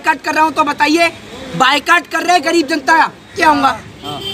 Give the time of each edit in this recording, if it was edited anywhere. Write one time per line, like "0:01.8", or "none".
0:03.3